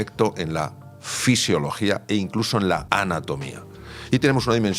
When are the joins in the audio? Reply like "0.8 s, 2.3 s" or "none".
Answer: 2.8 s